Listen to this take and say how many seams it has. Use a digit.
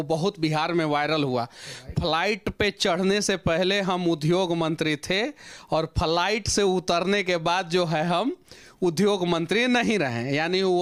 0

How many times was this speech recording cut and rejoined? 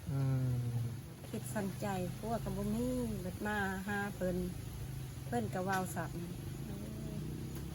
1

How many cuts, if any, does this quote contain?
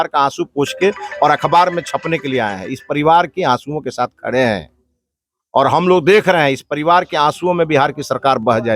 0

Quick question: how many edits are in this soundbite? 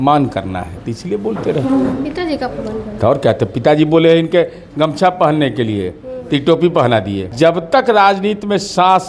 1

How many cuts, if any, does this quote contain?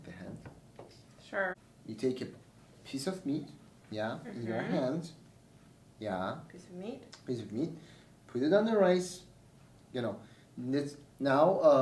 1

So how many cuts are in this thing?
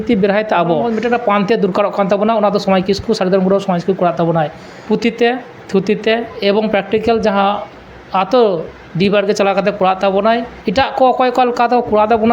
3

